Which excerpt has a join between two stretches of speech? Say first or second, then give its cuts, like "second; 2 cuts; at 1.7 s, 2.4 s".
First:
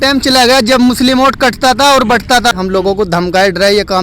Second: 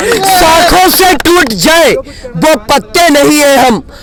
first; 1 cut; at 2.5 s